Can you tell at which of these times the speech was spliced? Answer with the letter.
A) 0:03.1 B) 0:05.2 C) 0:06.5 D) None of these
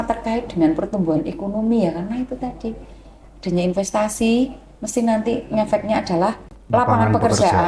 C